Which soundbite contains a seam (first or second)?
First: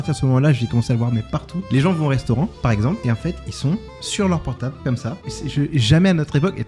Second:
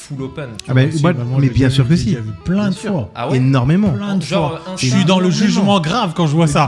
first